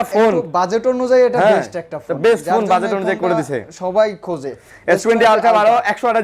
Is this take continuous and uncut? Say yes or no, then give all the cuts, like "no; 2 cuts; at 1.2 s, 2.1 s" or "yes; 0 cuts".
yes; 0 cuts